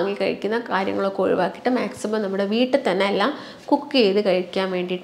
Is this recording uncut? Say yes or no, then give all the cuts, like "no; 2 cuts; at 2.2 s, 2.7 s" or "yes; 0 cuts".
yes; 0 cuts